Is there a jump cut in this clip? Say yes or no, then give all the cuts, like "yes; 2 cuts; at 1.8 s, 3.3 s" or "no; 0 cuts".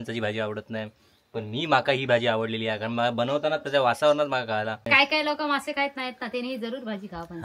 yes; 1 cut; at 4.8 s